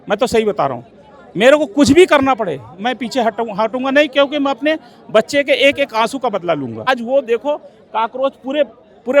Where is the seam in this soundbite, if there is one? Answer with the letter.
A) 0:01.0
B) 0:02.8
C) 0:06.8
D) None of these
C